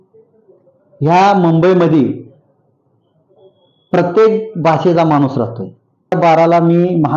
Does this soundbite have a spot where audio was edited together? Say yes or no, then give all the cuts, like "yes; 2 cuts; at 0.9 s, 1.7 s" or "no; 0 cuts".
yes; 1 cut; at 6.1 s